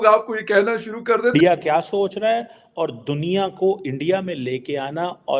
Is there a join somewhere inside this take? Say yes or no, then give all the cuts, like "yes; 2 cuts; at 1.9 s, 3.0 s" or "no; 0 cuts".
yes; 1 cut; at 1.3 s